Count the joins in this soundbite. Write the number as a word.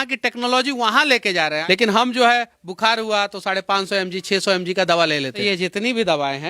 two